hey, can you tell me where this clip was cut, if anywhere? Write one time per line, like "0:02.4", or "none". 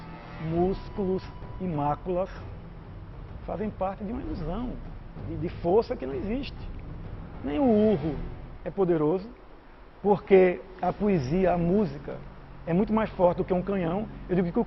0:01.0